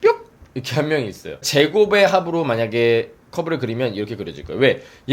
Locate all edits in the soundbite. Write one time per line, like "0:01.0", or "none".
0:01.5